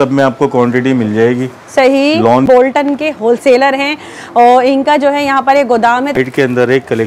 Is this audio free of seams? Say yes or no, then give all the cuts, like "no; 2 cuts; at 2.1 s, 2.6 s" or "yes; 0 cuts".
no; 2 cuts; at 2.5 s, 6.2 s